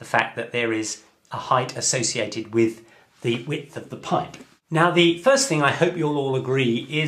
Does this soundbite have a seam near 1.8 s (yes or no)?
yes